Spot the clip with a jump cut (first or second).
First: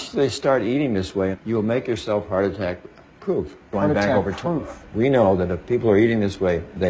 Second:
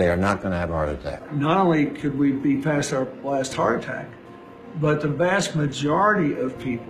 second